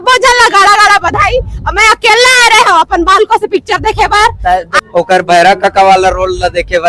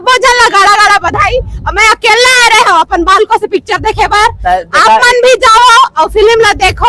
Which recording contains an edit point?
first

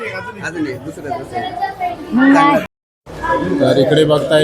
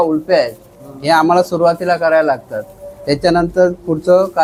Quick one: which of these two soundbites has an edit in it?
first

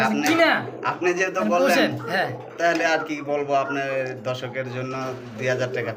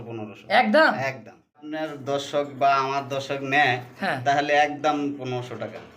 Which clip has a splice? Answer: second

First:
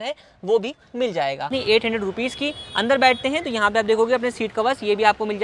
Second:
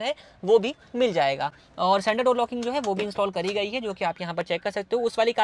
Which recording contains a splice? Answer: first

